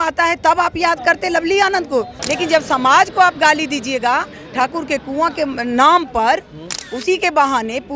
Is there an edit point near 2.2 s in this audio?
yes; 1 cut; at 2.2 s

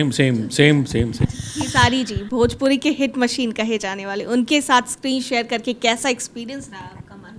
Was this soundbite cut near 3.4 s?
no; 1 cut; at 1.3 s

